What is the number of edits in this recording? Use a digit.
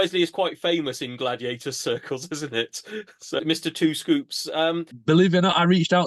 2